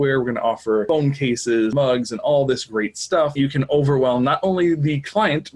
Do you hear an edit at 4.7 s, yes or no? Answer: no